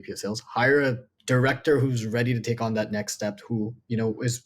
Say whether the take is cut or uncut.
cut